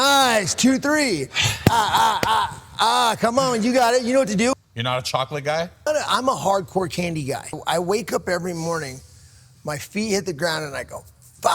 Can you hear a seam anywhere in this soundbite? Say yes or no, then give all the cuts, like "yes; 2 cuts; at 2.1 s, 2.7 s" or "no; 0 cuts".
yes; 3 cuts; at 4.5 s, 5.9 s, 7.6 s